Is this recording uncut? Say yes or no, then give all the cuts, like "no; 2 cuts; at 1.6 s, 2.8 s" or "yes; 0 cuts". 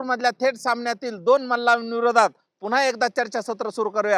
yes; 0 cuts